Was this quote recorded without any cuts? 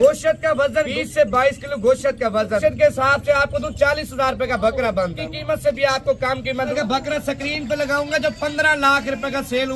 no; 4 cuts; at 0.9 s, 2.6 s, 5.2 s, 6.7 s

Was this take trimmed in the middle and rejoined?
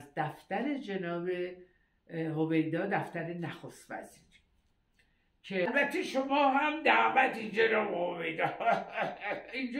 yes; 1 cut; at 5.7 s

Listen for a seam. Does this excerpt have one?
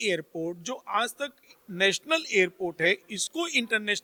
no; 0 cuts

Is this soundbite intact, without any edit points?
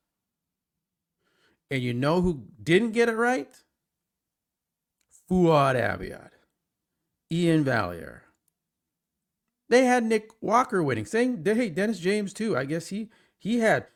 yes; 0 cuts

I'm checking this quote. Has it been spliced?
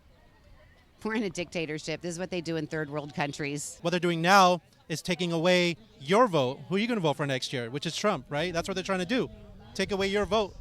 yes; 1 cut; at 3.7 s

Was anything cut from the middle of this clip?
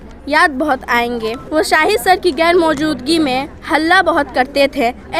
yes; 1 cut; at 1.4 s

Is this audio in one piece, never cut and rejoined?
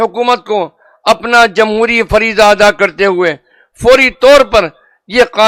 yes; 0 cuts

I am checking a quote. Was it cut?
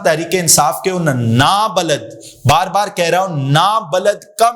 no; 0 cuts

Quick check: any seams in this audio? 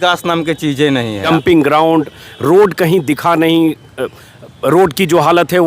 yes; 1 cut; at 1.2 s

